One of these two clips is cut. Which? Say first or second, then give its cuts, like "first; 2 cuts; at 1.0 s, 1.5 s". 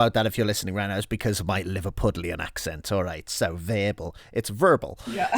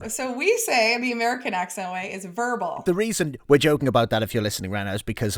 second; 1 cut; at 2.8 s